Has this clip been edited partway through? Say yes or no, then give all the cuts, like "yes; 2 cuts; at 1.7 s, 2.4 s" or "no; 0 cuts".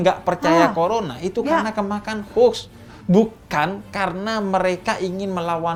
no; 0 cuts